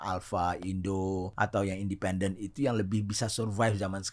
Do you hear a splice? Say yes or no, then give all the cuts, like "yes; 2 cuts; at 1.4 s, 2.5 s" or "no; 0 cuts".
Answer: yes; 1 cut; at 1.3 s